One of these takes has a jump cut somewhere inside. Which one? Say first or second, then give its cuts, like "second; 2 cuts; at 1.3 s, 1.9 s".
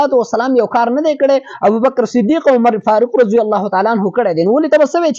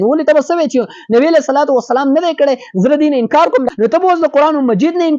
second; 1 cut; at 3.7 s